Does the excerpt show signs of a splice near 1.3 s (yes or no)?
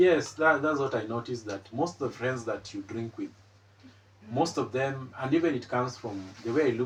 no